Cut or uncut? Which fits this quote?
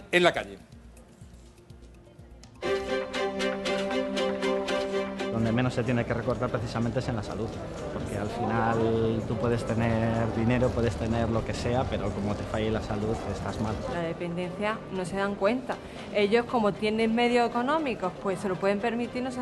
uncut